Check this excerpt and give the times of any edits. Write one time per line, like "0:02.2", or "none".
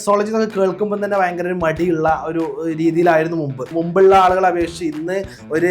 0:03.6